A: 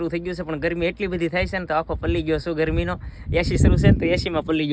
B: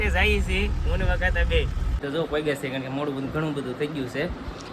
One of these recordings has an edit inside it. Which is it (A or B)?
B